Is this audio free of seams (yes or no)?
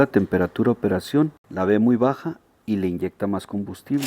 no